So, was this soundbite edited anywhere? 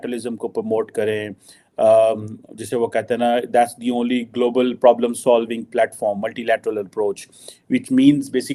no; 0 cuts

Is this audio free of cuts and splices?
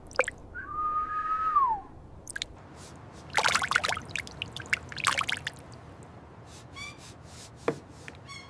yes; 0 cuts

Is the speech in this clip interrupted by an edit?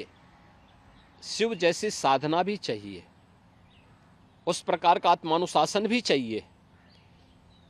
no; 0 cuts

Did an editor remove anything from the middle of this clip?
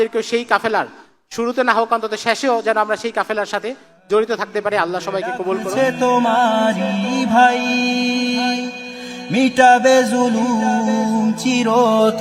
yes; 1 cut; at 5.7 s

